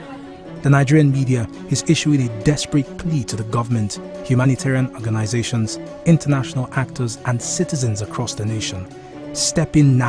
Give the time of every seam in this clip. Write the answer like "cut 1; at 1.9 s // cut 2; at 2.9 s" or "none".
none